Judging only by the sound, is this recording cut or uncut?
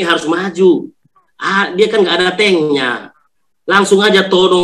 uncut